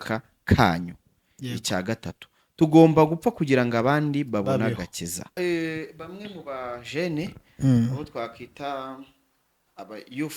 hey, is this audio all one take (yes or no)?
no